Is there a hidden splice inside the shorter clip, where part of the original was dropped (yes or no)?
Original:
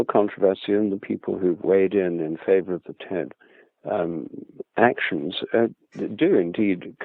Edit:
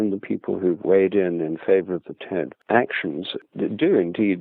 yes